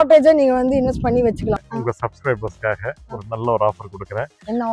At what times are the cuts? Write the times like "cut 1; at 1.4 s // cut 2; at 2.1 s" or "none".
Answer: cut 1; at 1.6 s

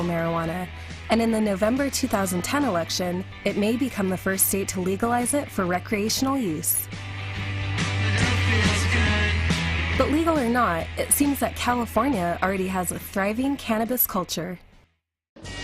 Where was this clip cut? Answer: cut 1; at 5.5 s

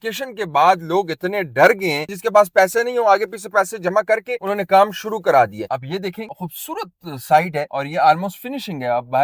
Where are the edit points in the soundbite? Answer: cut 1; at 2.1 s // cut 2; at 5.6 s // cut 3; at 7.7 s

